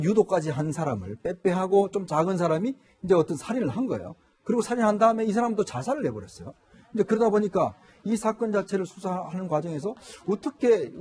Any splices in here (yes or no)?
no